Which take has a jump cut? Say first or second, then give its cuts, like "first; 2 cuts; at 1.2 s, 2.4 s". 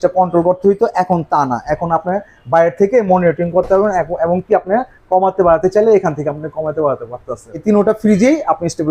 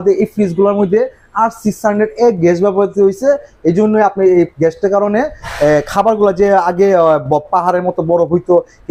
first; 1 cut; at 7.5 s